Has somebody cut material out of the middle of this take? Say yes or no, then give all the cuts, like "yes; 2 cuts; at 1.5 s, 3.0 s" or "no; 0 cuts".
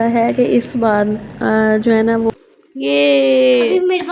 yes; 1 cut; at 2.3 s